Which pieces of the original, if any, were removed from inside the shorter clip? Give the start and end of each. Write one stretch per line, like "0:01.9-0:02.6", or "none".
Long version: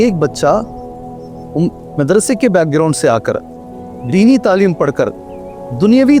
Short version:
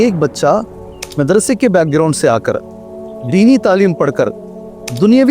0:01.0-0:01.8

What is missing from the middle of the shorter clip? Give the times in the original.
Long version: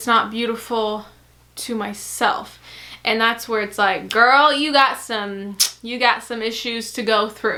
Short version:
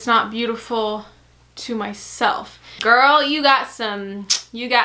0:02.7-0:04.0

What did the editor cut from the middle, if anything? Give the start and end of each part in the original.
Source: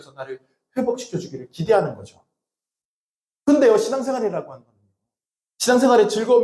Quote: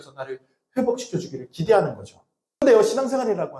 0:02.6-0:03.6

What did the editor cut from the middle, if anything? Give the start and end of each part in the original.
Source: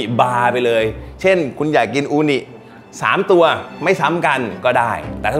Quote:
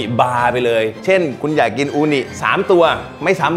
0:01.0-0:01.1
0:02.5-0:03.0

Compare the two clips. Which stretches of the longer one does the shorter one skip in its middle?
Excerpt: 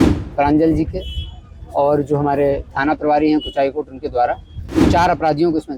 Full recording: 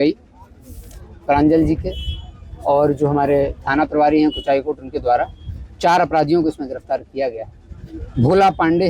none

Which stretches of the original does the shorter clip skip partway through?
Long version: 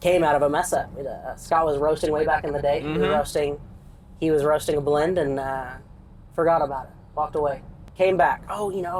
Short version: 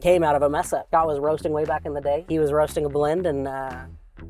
0:00.8-0:01.4
0:02.8-0:04.2

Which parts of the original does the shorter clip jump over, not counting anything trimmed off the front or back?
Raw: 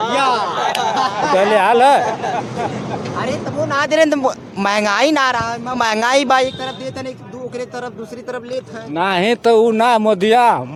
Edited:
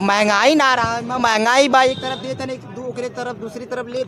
none

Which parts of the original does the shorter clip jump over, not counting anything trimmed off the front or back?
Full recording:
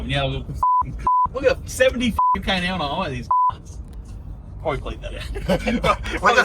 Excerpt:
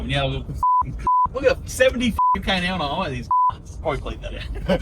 0:03.7-0:04.5

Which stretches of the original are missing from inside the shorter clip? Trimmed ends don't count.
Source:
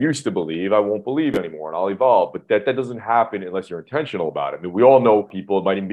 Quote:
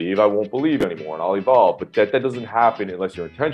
none

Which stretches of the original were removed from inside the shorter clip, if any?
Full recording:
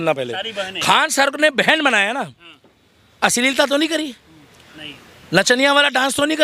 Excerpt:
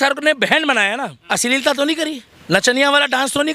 0:02.3-0:03.1
0:04.2-0:05.1

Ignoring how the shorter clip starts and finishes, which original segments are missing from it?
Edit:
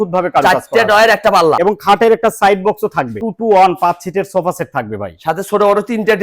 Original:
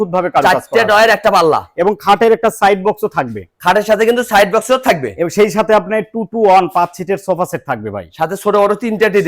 0:01.6-0:01.8
0:03.4-0:06.2

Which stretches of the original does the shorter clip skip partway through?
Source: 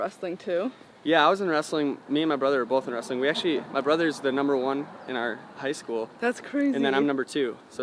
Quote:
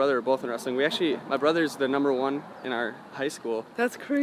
none

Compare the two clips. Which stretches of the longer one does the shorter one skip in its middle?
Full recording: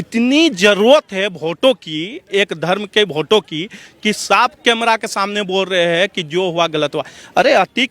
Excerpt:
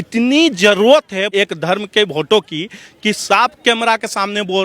0:01.3-0:02.3

